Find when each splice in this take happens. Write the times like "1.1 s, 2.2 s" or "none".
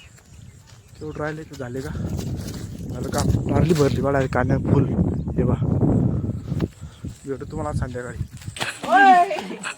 8.7 s

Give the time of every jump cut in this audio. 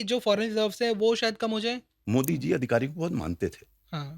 1.9 s

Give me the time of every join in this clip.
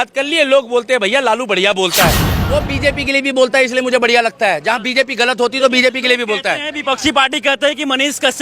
2.3 s

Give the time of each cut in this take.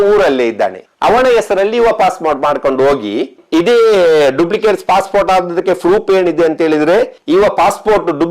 3.4 s, 7.2 s

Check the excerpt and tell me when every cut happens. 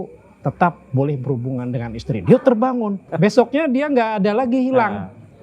3.1 s

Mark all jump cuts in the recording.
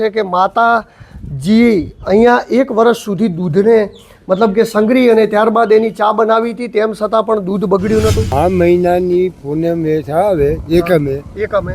8.2 s

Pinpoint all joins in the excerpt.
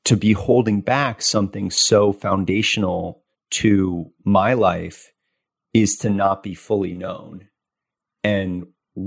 none

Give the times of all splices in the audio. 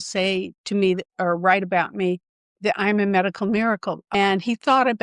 4.1 s

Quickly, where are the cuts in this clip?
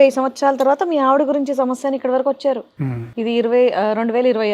none

